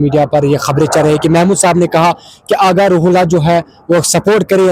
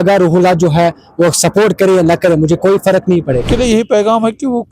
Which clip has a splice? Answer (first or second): second